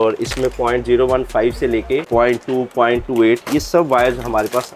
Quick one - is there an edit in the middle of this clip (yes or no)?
yes